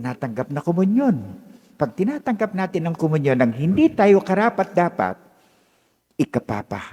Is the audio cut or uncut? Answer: uncut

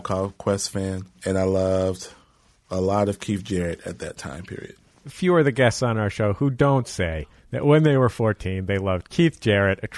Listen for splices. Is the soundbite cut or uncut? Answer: cut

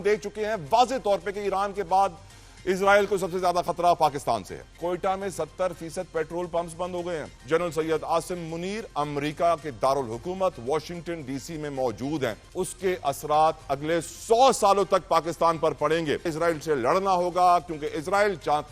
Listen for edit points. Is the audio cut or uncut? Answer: cut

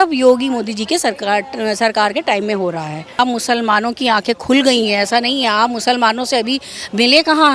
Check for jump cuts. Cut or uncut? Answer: cut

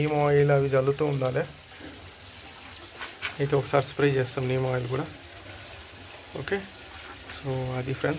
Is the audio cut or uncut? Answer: uncut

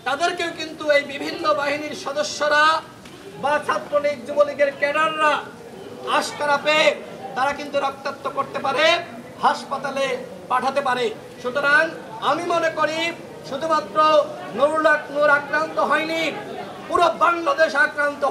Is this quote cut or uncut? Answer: uncut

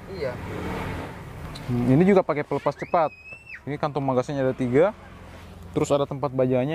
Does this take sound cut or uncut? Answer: cut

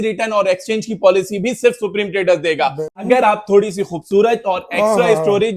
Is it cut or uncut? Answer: cut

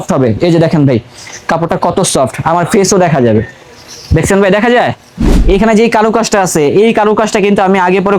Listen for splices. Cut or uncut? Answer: cut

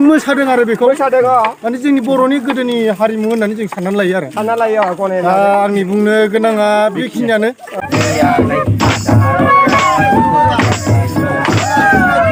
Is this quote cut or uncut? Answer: uncut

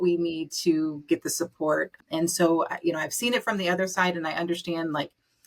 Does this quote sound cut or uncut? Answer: cut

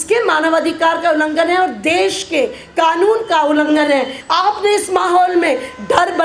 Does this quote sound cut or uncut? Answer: cut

